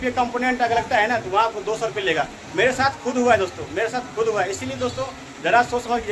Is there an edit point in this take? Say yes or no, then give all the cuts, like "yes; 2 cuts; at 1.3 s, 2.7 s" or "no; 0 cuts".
no; 0 cuts